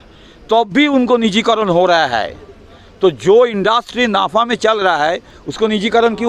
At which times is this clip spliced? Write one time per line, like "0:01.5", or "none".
0:05.3